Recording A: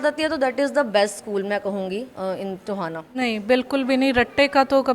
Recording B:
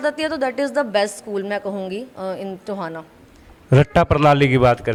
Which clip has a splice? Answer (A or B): A